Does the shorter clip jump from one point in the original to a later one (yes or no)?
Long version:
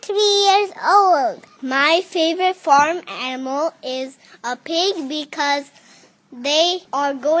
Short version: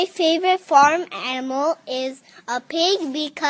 no